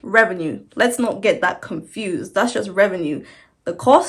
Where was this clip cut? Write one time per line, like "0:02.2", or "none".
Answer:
none